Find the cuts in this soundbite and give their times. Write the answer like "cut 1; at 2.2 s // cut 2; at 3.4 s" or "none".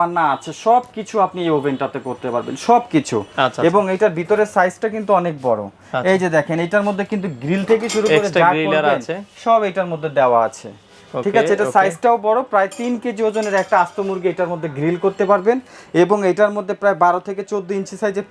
none